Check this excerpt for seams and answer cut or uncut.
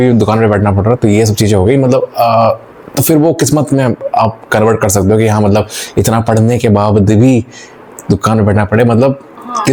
uncut